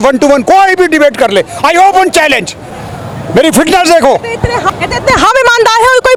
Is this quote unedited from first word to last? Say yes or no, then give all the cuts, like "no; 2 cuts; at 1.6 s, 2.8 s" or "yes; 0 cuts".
yes; 0 cuts